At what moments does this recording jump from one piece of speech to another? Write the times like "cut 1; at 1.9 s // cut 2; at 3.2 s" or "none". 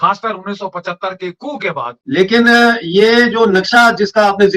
cut 1; at 2.0 s

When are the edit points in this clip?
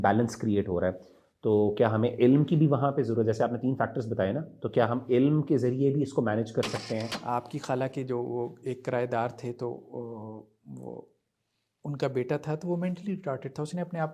cut 1; at 7.1 s

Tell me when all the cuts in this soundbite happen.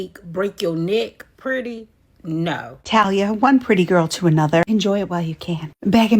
cut 1; at 3.1 s

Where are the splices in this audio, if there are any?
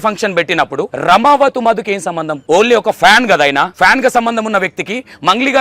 cut 1; at 0.9 s // cut 2; at 2.3 s // cut 3; at 3.7 s

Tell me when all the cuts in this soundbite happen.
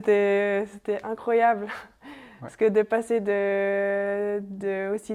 none

